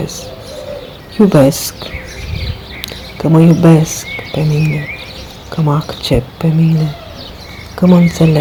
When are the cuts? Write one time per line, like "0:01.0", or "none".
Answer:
none